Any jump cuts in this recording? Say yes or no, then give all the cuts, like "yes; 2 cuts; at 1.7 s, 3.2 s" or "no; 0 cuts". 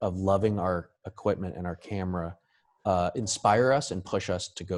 no; 0 cuts